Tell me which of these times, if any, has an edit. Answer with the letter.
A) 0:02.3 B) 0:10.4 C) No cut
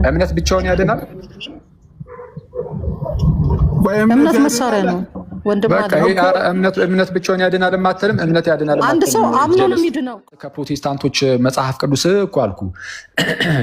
B